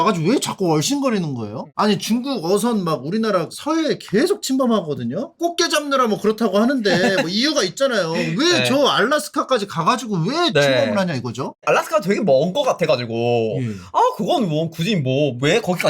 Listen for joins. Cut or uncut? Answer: uncut